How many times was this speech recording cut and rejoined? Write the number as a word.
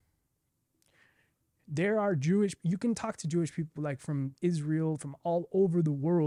zero